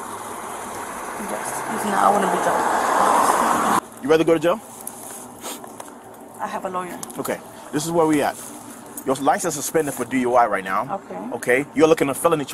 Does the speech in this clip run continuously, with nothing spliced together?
no; 1 cut; at 3.8 s

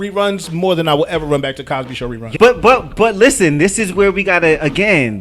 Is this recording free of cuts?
no; 1 cut; at 2.3 s

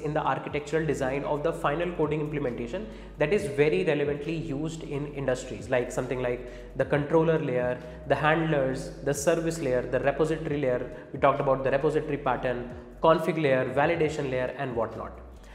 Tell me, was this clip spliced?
no; 0 cuts

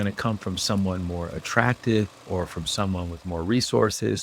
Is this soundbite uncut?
yes; 0 cuts

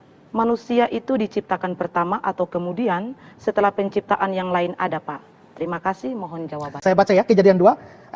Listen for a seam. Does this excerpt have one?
yes; 1 cut; at 6.7 s

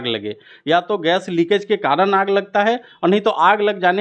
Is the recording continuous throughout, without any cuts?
yes; 0 cuts

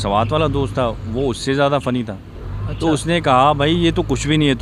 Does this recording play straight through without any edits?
yes; 0 cuts

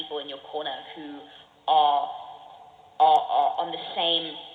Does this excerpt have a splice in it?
no; 0 cuts

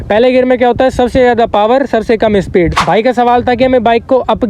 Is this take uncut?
no; 1 cut; at 2.8 s

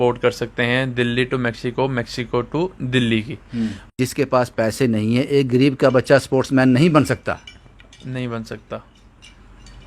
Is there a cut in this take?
yes; 1 cut; at 3.9 s

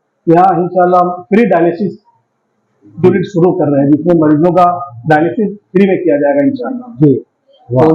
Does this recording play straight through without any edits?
yes; 0 cuts

